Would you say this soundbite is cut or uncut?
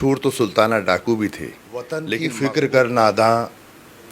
cut